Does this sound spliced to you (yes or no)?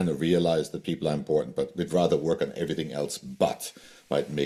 no